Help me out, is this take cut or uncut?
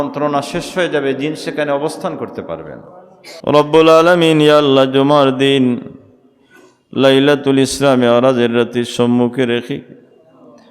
cut